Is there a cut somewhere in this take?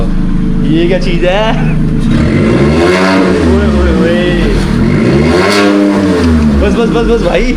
no; 0 cuts

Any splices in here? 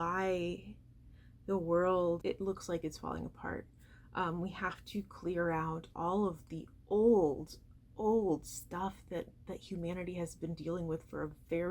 yes; 1 cut; at 2.2 s

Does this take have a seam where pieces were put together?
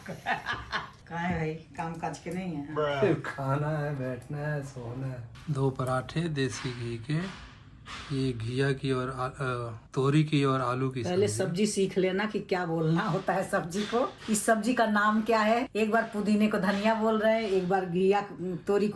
no; 0 cuts

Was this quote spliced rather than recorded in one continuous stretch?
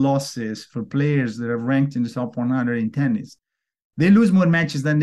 no; 0 cuts

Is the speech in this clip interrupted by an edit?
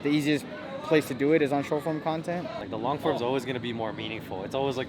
yes; 1 cut; at 2.6 s

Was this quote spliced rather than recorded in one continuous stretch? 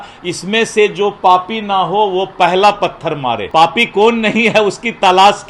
yes; 1 cut; at 3.4 s

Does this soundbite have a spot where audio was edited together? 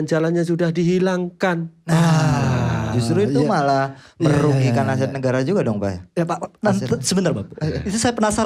no; 0 cuts

